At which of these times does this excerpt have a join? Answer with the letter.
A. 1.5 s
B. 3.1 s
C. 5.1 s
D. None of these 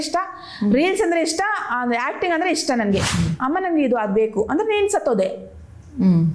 B